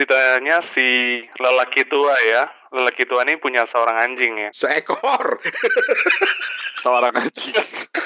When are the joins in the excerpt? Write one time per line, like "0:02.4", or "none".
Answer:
0:04.4